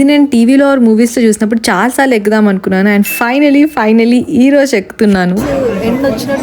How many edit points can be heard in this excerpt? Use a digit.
1